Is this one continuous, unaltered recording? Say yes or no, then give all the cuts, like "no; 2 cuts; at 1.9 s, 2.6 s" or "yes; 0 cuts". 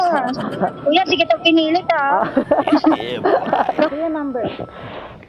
no; 1 cut; at 3.9 s